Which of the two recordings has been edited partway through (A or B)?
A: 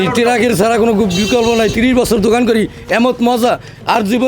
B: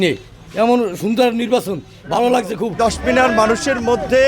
B